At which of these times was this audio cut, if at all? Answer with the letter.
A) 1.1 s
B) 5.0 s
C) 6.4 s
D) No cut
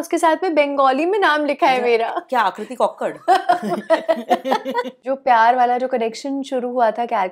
B